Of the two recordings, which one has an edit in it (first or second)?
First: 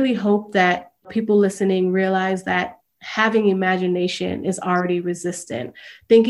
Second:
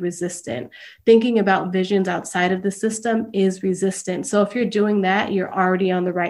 first